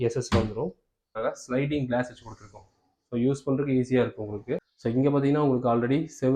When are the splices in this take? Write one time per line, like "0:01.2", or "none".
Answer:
0:01.1
0:04.7